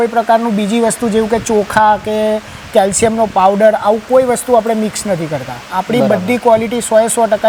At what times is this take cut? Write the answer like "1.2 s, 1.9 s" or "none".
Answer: none